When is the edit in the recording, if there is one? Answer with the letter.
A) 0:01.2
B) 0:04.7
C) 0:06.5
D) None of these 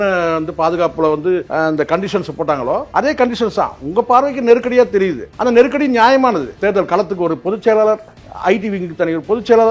C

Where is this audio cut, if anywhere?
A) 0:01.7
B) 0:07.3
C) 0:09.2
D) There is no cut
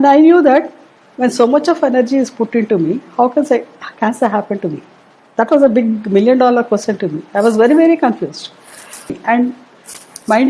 C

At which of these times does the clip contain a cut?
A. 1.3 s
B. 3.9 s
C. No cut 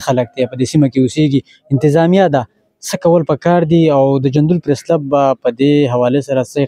C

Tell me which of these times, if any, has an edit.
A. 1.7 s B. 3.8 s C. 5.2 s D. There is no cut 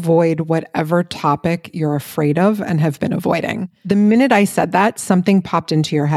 B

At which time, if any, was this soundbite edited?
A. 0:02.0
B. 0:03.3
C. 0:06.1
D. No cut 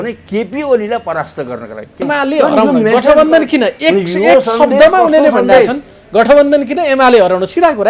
A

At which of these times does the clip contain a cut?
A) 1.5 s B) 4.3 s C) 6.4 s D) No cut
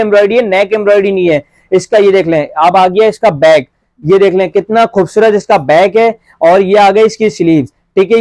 D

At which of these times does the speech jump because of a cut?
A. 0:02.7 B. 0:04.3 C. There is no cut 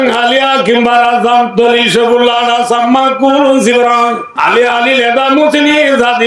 B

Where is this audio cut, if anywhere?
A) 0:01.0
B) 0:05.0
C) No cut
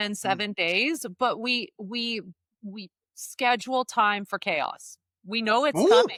C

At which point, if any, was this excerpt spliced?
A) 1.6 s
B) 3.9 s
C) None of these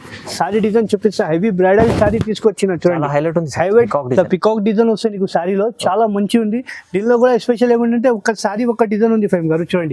B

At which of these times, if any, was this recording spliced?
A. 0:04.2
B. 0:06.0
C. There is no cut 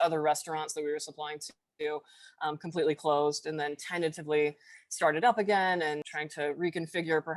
B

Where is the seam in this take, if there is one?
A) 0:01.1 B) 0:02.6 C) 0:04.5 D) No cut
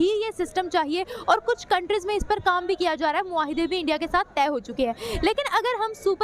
D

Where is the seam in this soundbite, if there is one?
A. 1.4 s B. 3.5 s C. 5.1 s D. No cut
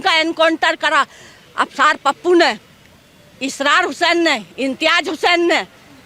D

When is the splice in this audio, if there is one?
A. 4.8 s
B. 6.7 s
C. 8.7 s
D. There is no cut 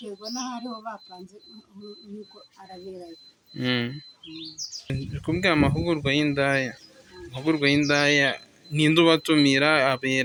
D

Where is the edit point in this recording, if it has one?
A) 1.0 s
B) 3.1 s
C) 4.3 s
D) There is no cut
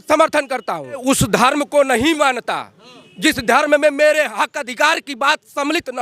A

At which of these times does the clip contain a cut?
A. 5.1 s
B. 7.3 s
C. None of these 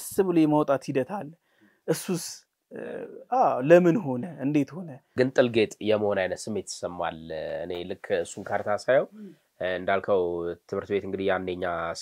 A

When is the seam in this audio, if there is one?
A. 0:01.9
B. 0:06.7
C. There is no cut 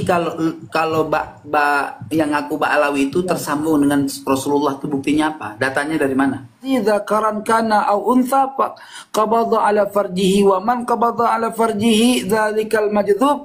B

